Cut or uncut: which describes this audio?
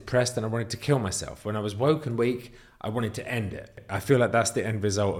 cut